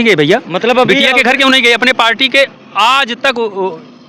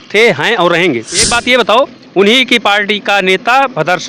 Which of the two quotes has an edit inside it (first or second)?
second